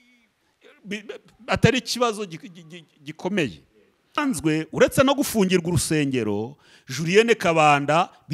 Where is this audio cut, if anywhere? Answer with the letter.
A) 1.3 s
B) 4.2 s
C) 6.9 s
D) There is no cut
B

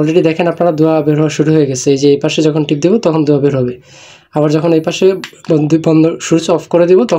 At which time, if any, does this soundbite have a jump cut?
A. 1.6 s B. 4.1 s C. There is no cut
C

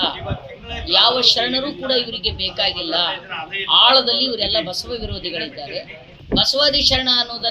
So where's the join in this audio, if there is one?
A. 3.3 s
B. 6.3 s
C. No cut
B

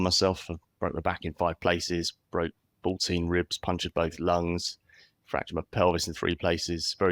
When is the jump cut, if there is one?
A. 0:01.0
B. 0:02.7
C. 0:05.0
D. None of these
D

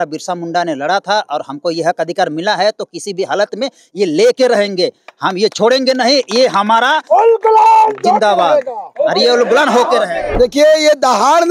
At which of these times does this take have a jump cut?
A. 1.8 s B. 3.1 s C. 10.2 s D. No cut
C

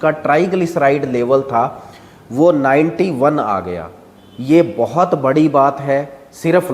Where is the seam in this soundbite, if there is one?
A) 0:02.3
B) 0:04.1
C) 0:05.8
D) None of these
D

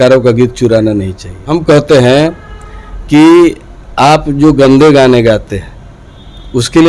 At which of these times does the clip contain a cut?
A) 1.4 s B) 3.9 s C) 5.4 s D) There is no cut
A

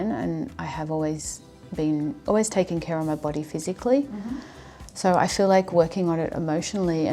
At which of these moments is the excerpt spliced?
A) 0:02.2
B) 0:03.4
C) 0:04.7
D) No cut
A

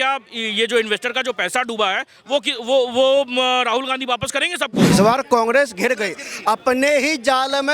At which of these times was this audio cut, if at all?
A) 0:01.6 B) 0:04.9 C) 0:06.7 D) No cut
B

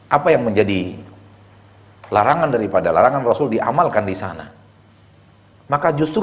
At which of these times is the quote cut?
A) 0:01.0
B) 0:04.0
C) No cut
C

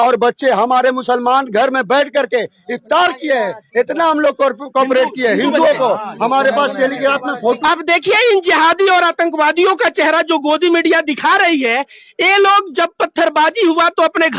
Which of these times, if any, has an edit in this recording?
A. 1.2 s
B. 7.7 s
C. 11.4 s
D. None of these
B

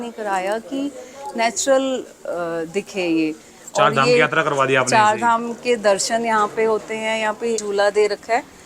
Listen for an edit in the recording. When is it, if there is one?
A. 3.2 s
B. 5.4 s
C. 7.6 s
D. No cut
C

